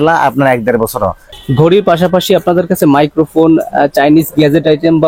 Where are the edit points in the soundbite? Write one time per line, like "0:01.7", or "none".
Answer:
0:01.3